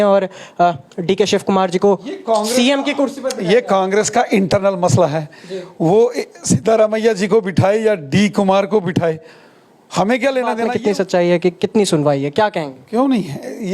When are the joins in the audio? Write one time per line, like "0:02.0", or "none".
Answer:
0:10.6